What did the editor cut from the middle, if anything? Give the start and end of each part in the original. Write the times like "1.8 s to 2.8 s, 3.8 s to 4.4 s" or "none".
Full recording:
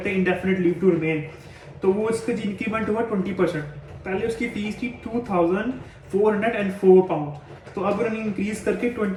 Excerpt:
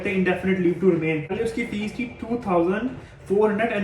1.3 s to 4.1 s

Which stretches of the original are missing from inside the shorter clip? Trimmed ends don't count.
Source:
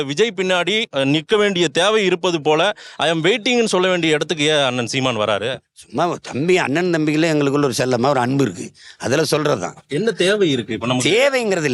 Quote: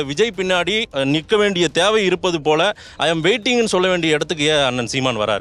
none

